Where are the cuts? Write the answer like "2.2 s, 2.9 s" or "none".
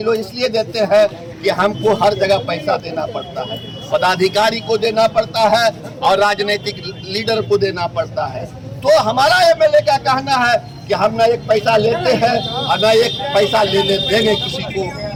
none